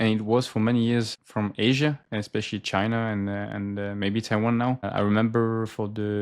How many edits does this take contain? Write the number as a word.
two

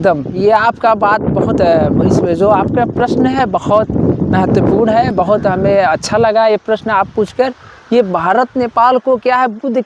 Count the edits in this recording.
zero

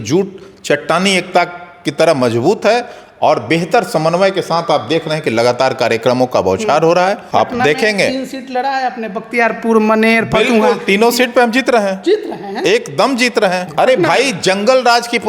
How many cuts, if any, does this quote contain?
two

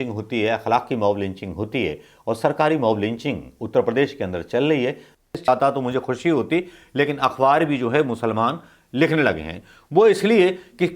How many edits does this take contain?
one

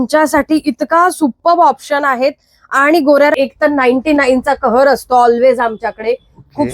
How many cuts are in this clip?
one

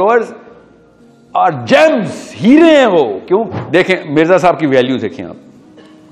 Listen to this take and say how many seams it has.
one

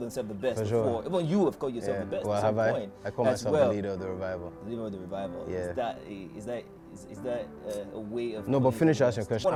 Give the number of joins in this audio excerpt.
zero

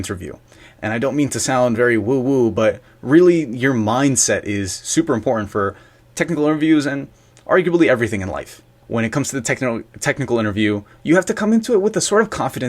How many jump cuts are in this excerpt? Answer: one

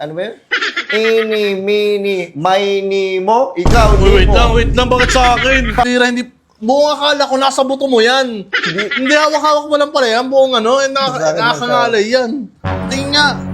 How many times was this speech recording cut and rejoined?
one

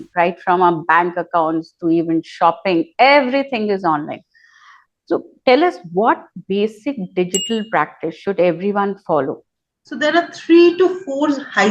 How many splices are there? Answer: one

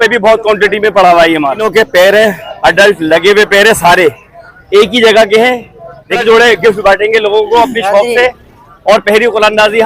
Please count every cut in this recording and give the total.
two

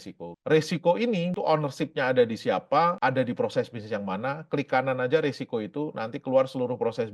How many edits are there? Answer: two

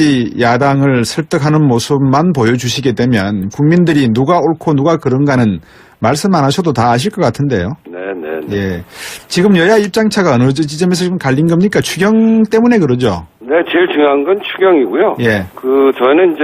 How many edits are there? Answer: one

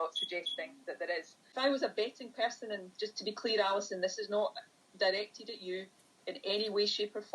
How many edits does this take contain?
one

